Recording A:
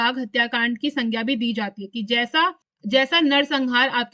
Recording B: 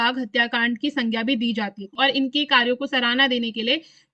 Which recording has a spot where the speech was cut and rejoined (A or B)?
B